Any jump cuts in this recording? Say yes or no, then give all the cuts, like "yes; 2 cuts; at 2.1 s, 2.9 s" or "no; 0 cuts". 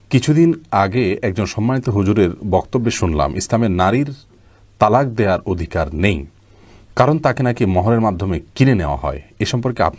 no; 0 cuts